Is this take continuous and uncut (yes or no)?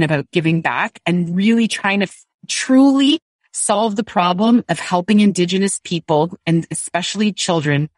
yes